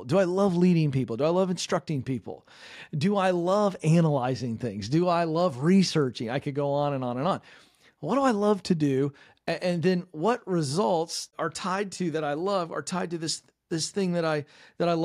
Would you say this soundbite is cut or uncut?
cut